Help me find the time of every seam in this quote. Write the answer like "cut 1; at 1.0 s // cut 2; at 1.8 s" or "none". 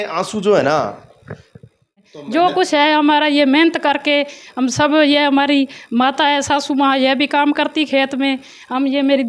cut 1; at 2.1 s